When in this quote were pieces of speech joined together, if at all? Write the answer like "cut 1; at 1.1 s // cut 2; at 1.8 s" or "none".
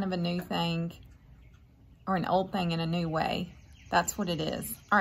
none